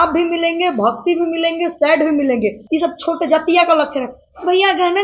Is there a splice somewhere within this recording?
yes; 1 cut; at 2.6 s

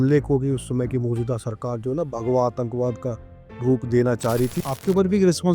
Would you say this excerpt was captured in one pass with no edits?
no; 1 cut; at 4.6 s

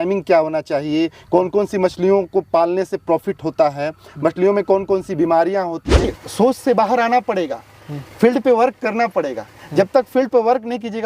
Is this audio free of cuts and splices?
no; 1 cut; at 6.2 s

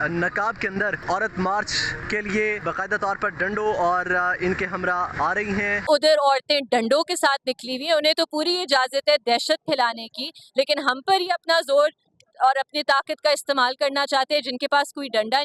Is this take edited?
yes; 4 cuts; at 1.0 s, 1.9 s, 2.6 s, 5.5 s

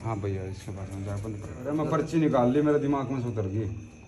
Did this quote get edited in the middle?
yes; 1 cut; at 1.6 s

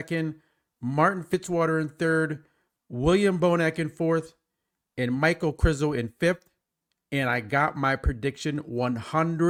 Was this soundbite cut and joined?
no; 0 cuts

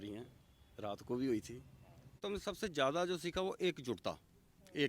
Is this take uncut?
no; 1 cut; at 2.2 s

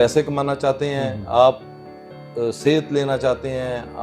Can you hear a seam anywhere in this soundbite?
no; 0 cuts

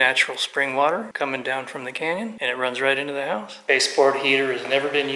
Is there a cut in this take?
yes; 3 cuts; at 1.1 s, 2.4 s, 3.5 s

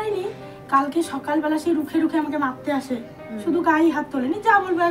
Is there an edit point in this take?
no; 0 cuts

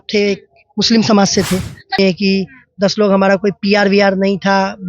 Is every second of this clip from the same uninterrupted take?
no; 1 cut; at 2.0 s

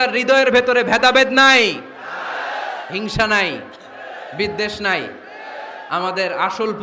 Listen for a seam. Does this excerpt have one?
no; 0 cuts

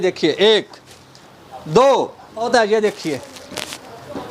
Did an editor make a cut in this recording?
yes; 1 cut; at 2.5 s

